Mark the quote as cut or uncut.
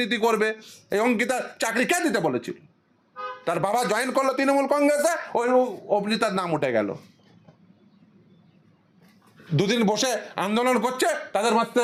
uncut